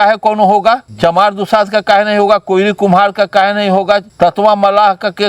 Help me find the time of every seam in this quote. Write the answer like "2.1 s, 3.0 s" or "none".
0.9 s, 4.1 s